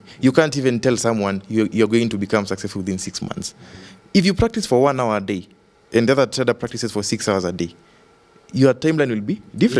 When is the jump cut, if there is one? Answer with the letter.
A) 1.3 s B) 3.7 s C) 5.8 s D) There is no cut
D